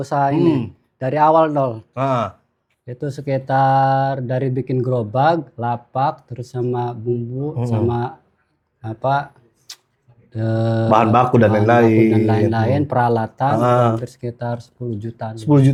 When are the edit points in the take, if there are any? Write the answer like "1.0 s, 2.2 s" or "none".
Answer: none